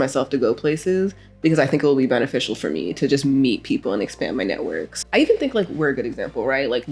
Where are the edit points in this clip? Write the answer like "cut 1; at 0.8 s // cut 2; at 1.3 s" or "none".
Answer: cut 1; at 4.9 s